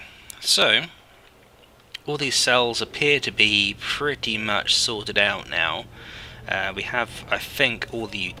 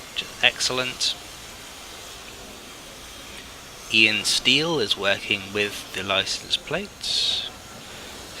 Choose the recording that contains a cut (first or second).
second